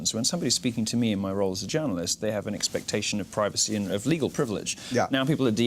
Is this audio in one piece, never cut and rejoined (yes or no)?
no